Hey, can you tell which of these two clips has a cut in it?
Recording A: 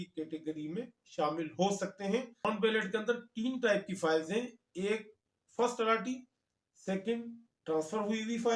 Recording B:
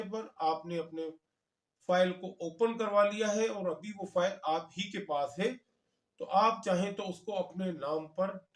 A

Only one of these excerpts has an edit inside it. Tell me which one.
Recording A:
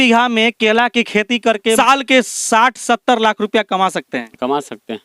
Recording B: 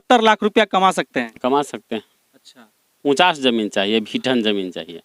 A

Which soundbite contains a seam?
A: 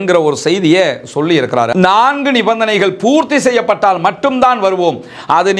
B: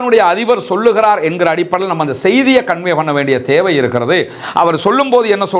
A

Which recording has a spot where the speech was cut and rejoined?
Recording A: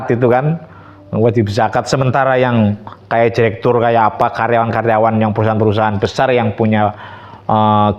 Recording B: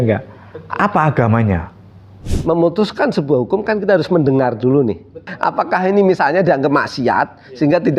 B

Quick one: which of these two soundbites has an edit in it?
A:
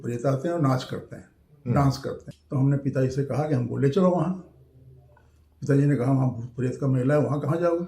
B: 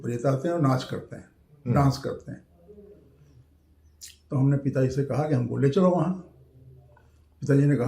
A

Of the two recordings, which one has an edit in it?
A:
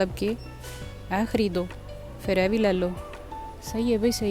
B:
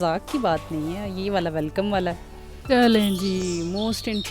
B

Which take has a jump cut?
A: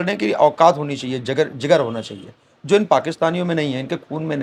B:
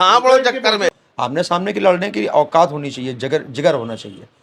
B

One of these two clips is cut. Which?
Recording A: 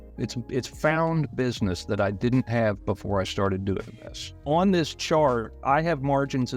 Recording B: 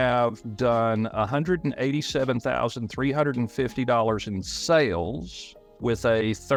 A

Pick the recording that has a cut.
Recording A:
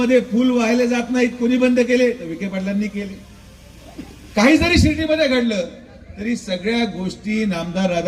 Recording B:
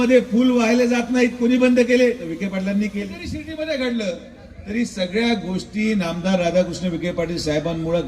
B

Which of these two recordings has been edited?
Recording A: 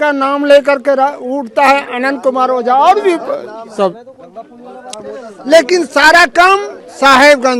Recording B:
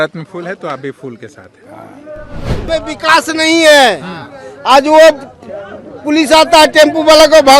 B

